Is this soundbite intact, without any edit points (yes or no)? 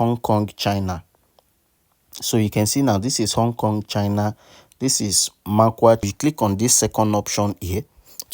no